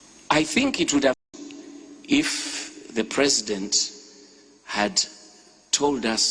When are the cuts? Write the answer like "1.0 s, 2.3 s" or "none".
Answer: 1.2 s